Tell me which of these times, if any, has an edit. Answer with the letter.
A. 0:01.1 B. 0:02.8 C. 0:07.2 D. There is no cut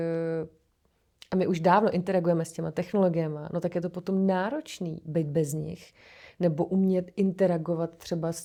D